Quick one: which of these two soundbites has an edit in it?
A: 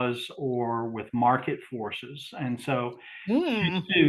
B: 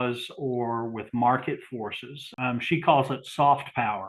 B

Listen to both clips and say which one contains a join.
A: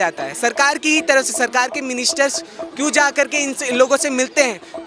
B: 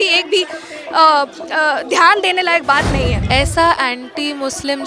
B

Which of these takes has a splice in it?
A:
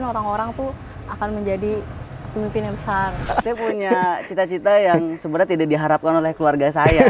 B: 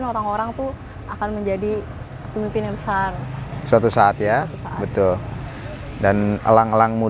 A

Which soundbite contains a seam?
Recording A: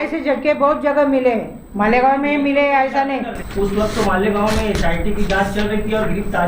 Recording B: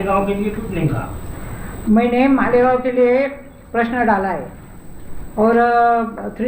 A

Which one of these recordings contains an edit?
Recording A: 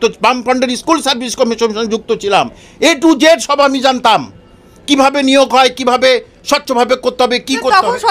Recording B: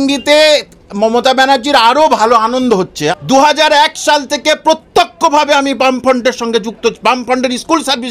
B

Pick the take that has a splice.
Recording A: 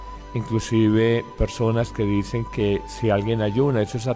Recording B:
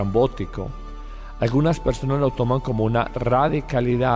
B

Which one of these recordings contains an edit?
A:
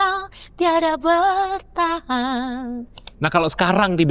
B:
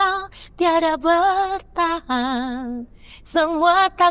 A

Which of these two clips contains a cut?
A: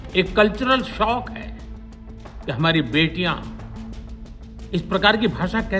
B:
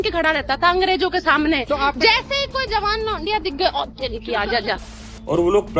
B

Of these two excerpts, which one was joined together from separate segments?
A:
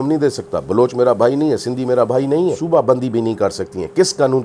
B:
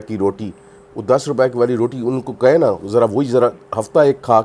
A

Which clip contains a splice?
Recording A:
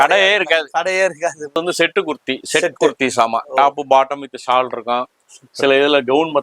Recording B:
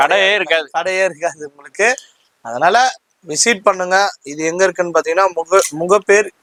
A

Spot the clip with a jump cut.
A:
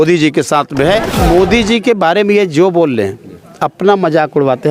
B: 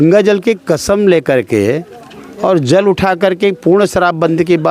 A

